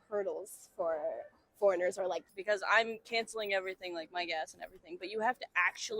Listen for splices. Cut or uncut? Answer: cut